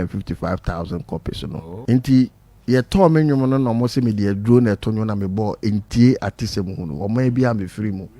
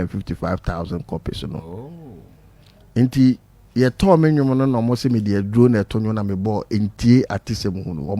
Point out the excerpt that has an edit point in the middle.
first; 1 cut; at 1.7 s

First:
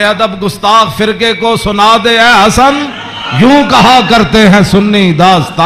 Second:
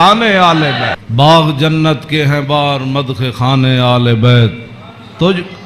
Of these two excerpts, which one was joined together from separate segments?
second; 1 cut; at 1.1 s

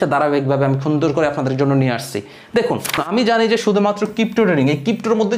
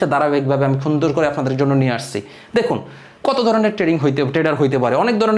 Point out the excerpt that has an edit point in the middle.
first; 1 cut; at 3.0 s

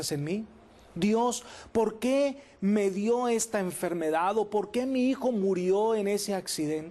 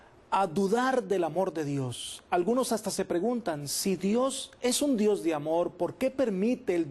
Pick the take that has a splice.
first; 1 cut; at 3.0 s

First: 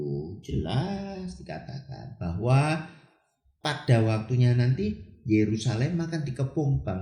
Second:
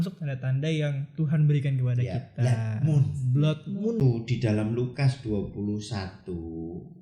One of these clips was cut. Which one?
second; 1 cut; at 4.0 s

